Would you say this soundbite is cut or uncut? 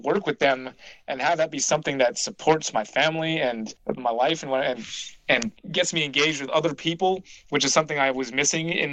cut